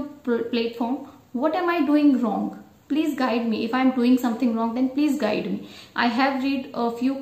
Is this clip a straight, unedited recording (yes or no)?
yes